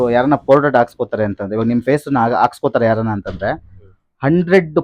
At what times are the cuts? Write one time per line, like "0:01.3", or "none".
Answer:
none